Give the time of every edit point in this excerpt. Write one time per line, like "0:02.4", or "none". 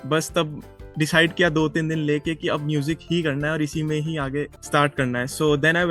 0:04.6